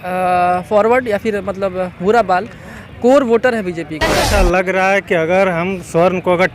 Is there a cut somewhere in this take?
yes; 1 cut; at 4.3 s

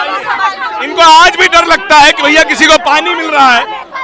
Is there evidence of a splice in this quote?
no; 0 cuts

